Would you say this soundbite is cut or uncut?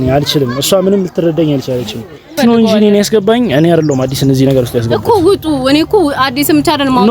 cut